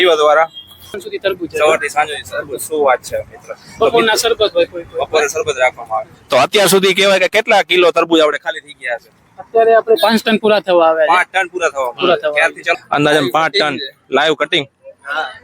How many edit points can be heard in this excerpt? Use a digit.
2